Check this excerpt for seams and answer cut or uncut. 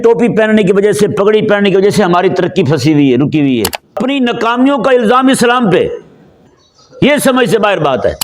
cut